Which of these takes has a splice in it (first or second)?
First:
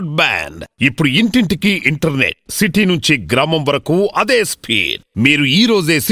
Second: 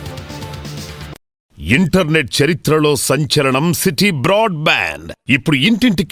second